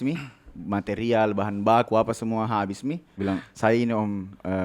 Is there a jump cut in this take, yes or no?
yes